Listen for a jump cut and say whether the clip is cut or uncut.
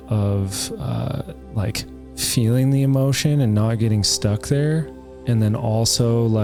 uncut